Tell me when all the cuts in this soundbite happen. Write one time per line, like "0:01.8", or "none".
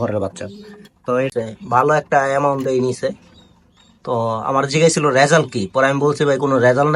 0:01.3